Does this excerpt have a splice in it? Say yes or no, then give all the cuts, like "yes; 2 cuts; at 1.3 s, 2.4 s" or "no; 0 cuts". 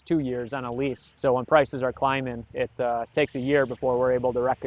yes; 2 cuts; at 1.1 s, 2.5 s